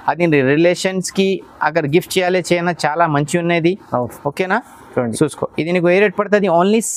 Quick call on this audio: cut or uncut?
uncut